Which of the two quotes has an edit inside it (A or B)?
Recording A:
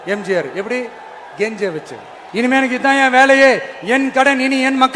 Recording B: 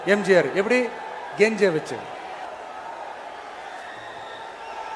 A